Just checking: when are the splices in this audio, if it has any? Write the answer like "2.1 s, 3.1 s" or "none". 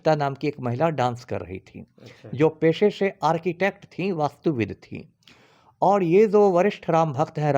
none